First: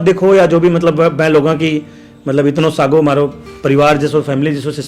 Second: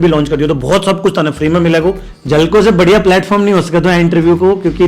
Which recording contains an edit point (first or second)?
second